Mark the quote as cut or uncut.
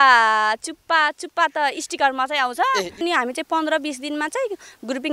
cut